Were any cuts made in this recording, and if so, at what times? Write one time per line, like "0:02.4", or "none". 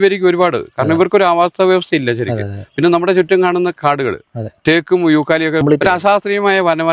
0:05.6

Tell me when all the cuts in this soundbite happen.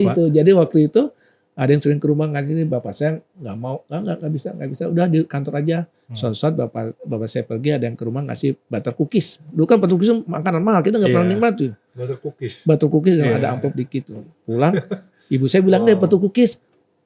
none

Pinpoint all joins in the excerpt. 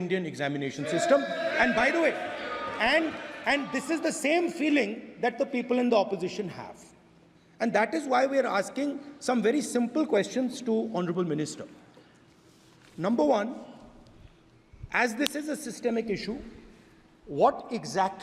none

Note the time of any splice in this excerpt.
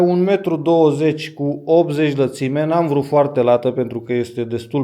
none

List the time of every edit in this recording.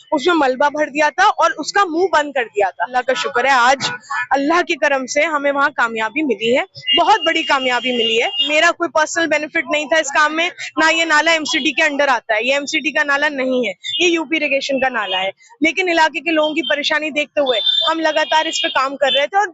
0:02.9
0:08.5

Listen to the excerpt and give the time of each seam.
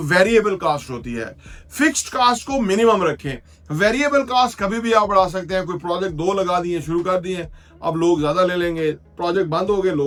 none

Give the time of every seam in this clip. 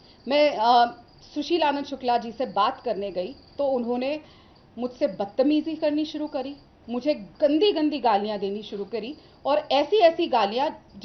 none

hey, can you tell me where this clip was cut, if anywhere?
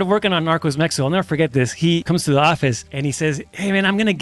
0:02.0
0:03.3

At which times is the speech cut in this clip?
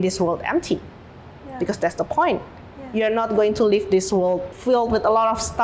0:04.5

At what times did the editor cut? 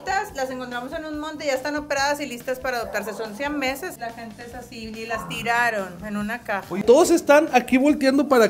0:03.9
0:06.8

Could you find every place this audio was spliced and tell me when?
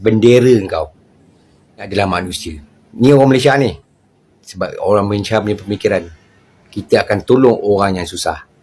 0:01.9

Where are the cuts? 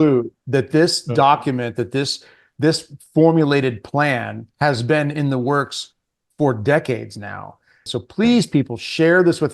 0:07.9

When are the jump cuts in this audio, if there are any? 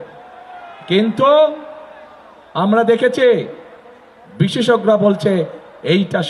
none

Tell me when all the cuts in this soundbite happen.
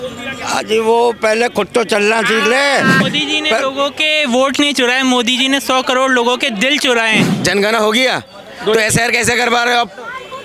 0:03.1
0:07.3

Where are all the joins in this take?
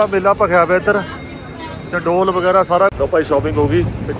0:02.9

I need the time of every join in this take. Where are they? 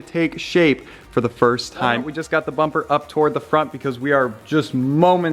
0:02.0

